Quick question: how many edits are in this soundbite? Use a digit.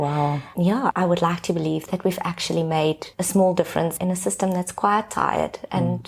2